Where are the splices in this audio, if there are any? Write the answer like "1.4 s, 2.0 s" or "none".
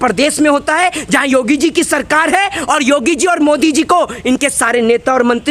none